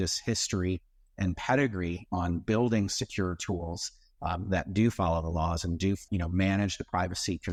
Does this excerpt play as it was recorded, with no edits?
yes; 0 cuts

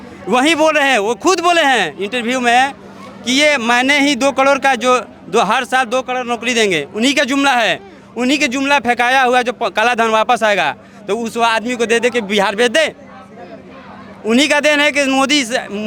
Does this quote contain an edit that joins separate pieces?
no; 0 cuts

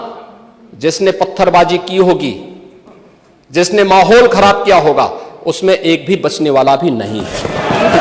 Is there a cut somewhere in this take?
no; 0 cuts

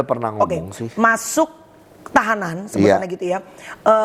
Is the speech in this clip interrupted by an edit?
no; 0 cuts

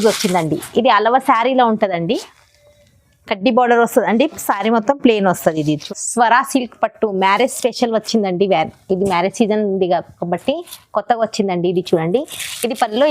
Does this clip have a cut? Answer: yes; 1 cut; at 5.8 s

